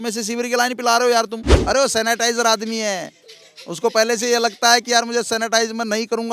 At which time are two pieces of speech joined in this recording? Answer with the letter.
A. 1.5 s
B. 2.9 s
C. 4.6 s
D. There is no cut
A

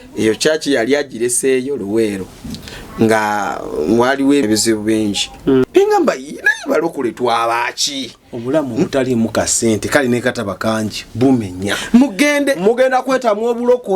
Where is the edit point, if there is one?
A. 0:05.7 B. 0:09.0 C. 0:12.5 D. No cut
A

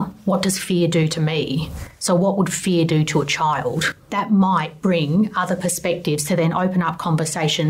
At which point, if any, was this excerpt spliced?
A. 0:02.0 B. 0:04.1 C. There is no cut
B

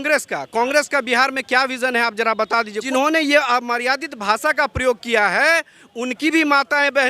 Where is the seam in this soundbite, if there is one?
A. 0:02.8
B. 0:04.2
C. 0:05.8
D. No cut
A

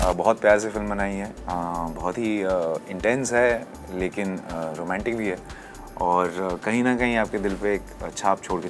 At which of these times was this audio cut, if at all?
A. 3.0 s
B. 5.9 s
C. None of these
C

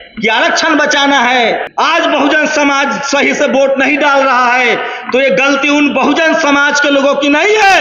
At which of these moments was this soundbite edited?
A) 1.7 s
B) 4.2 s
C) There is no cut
A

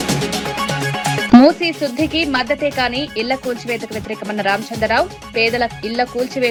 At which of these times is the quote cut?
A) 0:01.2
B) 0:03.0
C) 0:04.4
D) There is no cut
D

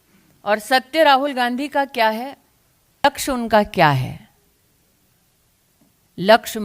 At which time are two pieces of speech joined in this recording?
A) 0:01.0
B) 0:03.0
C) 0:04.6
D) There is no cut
B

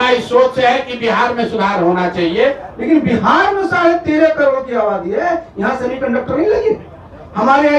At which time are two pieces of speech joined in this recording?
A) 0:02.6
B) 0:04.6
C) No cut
A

